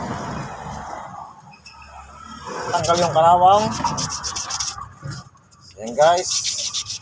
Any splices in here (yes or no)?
yes